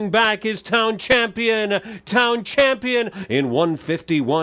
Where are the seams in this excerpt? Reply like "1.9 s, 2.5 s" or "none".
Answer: 3.2 s